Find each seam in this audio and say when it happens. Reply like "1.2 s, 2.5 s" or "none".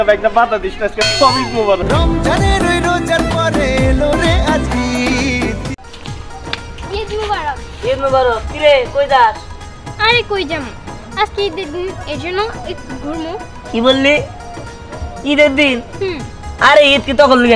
5.8 s